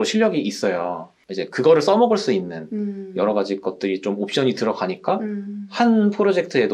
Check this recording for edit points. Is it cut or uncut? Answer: uncut